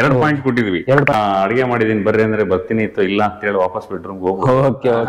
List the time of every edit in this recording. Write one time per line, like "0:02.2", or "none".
0:01.1